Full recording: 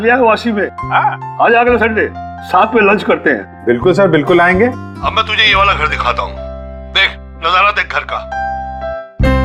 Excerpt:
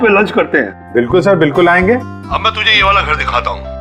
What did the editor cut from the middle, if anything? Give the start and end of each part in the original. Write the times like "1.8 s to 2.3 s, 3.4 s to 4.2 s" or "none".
none